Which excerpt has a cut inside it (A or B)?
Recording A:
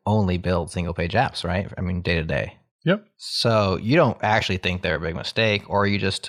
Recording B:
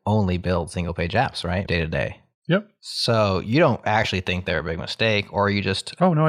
B